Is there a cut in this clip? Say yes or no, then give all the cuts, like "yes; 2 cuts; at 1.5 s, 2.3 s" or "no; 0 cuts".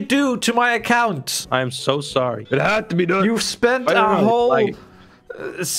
no; 0 cuts